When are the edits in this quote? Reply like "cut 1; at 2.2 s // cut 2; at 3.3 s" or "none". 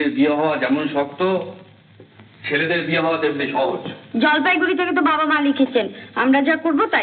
none